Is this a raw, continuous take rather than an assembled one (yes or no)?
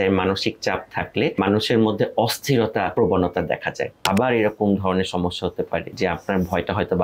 no